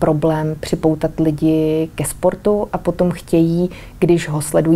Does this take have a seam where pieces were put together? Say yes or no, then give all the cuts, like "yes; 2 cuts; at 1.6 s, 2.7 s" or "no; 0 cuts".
no; 0 cuts